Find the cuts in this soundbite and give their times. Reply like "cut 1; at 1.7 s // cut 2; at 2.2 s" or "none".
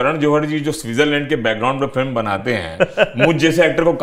none